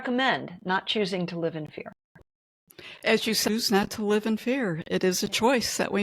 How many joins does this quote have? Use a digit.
1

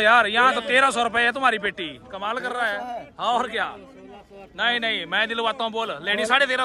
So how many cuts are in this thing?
0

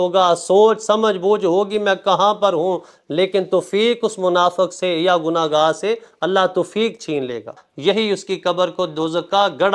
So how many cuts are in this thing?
1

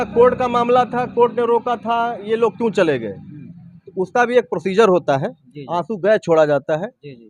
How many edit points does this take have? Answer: 0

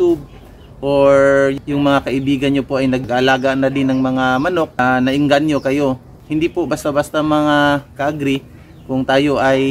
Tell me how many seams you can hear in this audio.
2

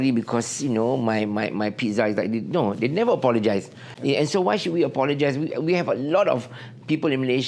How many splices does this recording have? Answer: 1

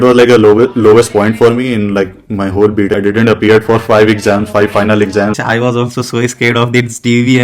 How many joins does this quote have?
2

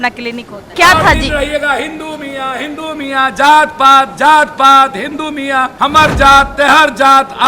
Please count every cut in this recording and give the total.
2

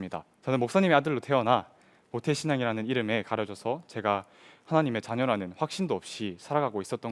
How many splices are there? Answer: 0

